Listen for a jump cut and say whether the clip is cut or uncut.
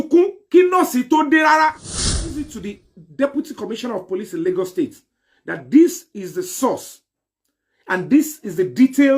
cut